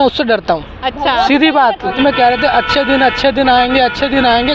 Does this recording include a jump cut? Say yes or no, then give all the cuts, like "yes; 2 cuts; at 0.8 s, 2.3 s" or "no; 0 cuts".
yes; 1 cut; at 1.9 s